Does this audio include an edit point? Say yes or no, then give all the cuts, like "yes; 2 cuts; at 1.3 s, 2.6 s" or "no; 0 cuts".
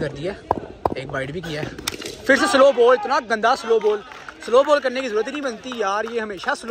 no; 0 cuts